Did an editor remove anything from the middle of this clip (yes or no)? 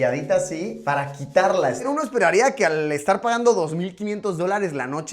yes